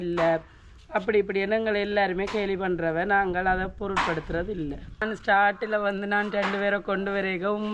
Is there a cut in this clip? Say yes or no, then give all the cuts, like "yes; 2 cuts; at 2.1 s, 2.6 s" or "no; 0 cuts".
no; 0 cuts